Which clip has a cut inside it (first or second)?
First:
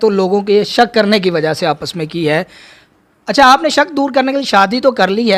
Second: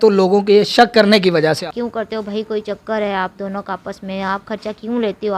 second